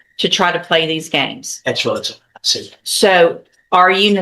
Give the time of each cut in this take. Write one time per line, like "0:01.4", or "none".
none